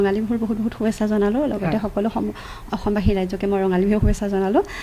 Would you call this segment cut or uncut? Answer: uncut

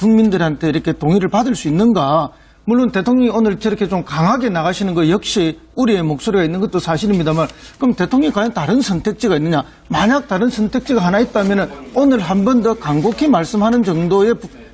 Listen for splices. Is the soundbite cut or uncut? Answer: cut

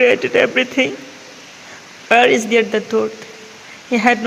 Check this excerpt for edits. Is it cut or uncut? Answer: uncut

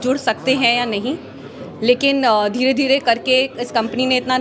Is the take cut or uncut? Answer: uncut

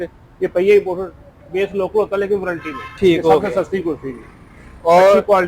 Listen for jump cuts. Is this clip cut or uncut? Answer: uncut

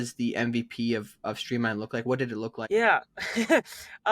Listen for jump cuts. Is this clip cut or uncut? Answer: cut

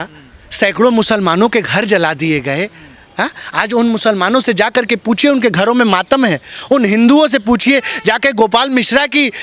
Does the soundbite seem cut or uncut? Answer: uncut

